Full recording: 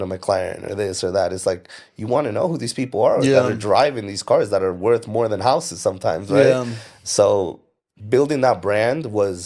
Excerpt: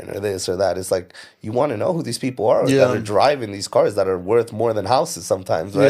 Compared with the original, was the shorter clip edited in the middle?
no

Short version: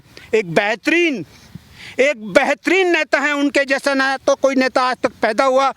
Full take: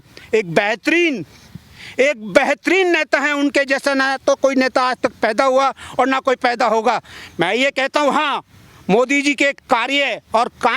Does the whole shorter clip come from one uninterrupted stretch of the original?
yes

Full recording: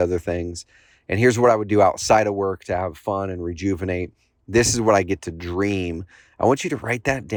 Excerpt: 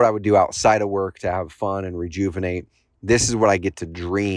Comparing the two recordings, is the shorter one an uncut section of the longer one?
yes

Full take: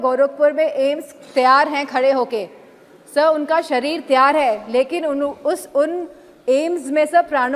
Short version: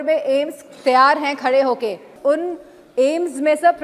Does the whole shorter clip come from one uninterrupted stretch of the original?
no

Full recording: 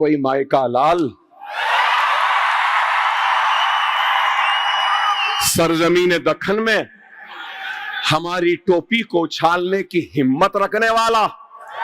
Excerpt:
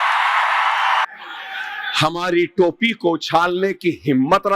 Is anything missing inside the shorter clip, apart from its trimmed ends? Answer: yes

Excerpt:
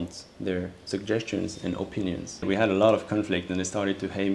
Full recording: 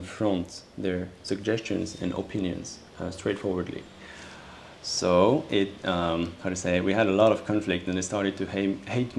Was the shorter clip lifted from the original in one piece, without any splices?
no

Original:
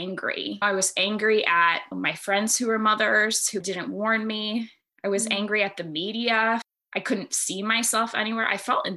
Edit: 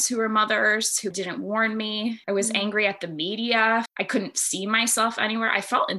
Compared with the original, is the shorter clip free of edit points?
no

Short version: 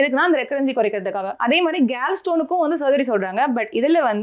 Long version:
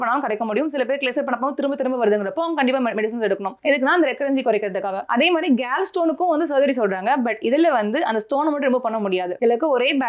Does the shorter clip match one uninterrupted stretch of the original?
yes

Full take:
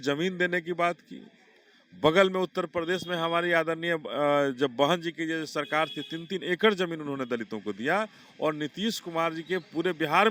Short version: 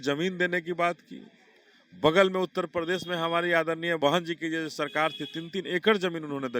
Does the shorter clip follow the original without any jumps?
no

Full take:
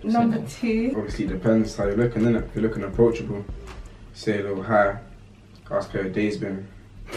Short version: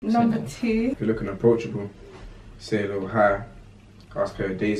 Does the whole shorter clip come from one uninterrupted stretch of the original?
no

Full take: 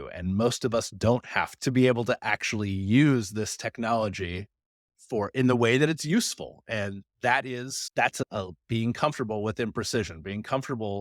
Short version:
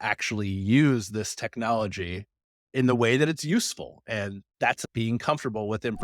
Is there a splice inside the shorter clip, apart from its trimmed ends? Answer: yes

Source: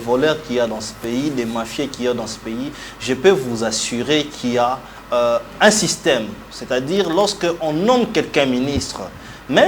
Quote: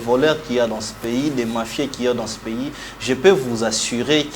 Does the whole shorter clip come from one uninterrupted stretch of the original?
yes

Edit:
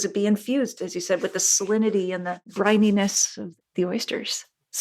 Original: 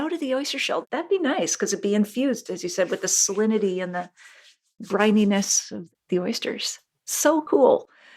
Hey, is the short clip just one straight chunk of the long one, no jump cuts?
no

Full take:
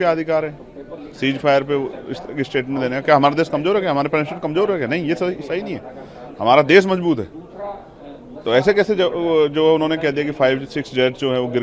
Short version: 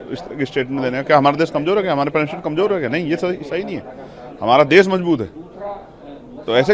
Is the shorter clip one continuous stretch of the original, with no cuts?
yes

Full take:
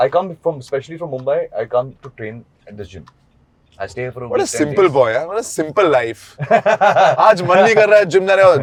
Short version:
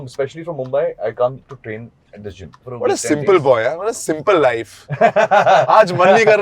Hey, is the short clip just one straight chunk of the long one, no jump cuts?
no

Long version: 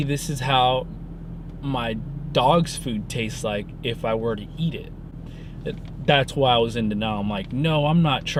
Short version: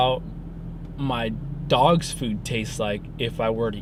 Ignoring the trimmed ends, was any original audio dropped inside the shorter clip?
no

